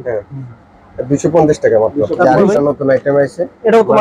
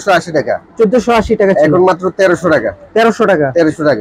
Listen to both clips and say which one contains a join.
first; 1 cut; at 2.1 s

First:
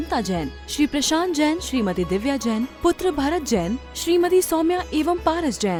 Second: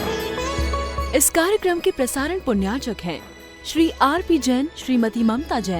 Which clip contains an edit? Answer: second; 1 cut; at 1.0 s

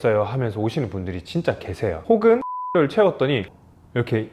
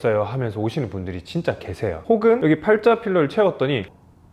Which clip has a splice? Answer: first; 1 cut; at 2.6 s

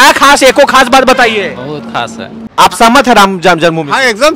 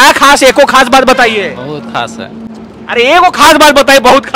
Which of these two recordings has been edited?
first; 1 cut; at 2.5 s

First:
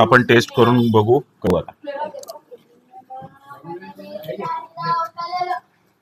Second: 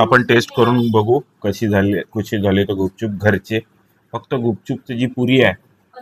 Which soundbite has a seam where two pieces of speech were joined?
first; 1 cut; at 1.5 s

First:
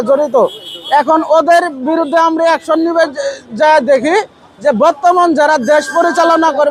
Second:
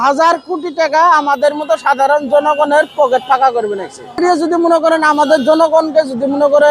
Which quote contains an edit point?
second; 1 cut; at 4.1 s

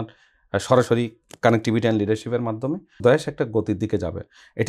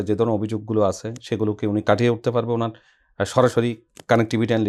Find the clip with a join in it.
first; 1 cut; at 3.0 s

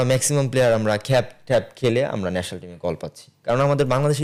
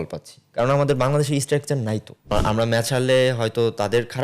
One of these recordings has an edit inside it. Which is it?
second; 1 cut; at 2.3 s

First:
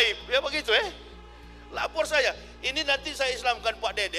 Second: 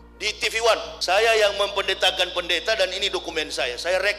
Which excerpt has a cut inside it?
second; 1 cut; at 0.9 s

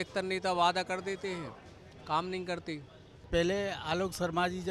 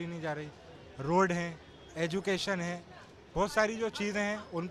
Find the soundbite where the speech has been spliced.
first; 1 cut; at 3.3 s

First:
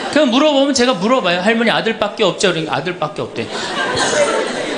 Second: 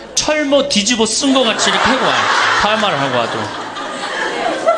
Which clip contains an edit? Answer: first; 1 cut; at 3.7 s

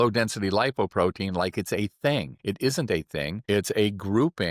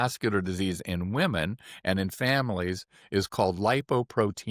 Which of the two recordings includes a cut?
first; 2 cuts; at 2.3 s, 3.4 s

